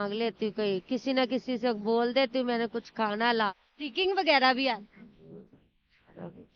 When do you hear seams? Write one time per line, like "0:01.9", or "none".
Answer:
0:03.6